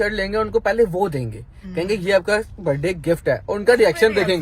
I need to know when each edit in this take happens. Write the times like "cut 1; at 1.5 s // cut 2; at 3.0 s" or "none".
none